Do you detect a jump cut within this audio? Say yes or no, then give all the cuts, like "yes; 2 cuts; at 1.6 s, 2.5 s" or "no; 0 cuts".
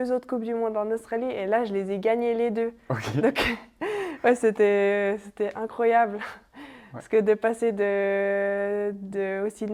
no; 0 cuts